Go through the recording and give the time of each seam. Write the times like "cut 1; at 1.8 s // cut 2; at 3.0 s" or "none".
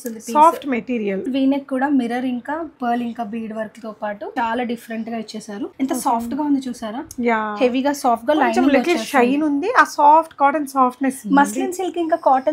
cut 1; at 1.2 s // cut 2; at 2.7 s // cut 3; at 4.3 s // cut 4; at 5.7 s